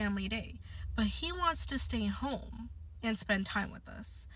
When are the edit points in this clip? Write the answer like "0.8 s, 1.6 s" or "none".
1.3 s